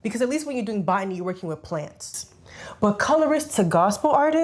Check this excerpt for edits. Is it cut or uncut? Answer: cut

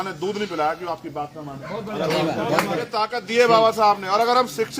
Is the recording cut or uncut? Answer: cut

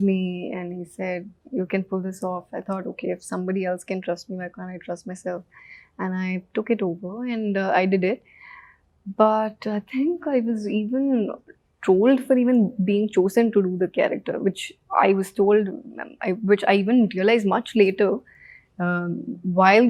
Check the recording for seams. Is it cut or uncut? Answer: uncut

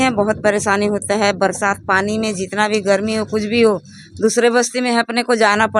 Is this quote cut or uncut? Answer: uncut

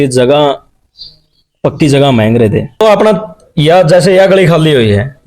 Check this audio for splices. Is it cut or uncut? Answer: cut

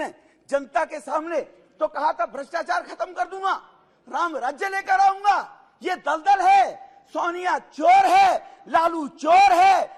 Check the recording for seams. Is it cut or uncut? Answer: uncut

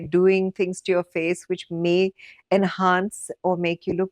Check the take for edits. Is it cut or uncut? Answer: uncut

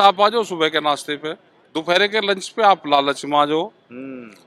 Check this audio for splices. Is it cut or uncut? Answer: uncut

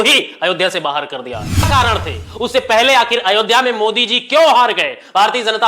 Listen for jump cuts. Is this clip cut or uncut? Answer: cut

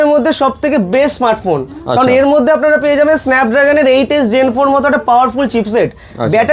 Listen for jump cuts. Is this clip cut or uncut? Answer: uncut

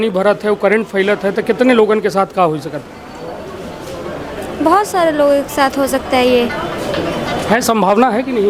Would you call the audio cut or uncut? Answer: uncut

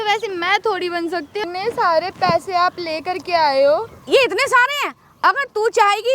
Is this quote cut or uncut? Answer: cut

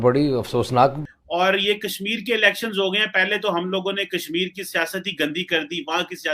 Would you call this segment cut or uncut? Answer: cut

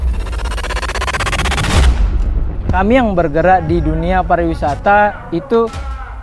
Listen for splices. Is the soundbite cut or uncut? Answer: cut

